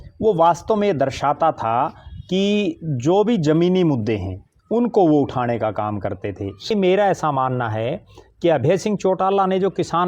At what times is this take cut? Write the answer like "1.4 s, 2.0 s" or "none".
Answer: 6.7 s